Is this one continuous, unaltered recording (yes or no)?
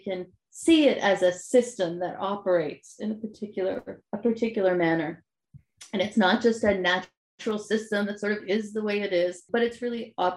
no